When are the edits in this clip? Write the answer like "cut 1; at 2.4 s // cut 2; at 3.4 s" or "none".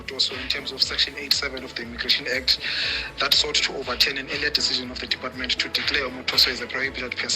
none